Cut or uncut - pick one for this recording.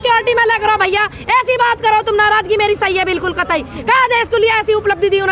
uncut